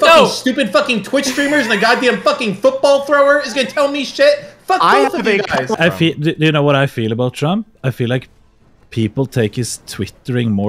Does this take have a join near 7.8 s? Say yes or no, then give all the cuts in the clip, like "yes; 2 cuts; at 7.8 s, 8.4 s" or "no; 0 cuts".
no; 1 cut; at 5.8 s